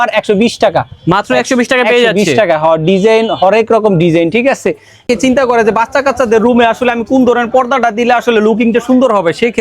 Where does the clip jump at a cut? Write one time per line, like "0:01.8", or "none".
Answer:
0:05.0